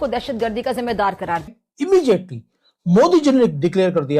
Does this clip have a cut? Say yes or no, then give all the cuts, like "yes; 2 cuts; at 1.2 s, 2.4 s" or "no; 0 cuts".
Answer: yes; 1 cut; at 1.6 s